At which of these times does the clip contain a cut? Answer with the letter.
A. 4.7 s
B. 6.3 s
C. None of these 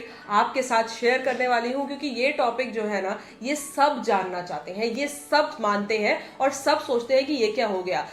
C